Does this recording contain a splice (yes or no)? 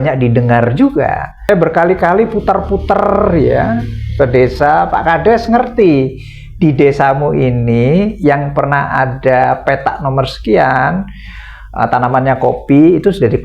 yes